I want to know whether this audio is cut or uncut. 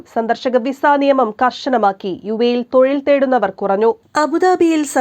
uncut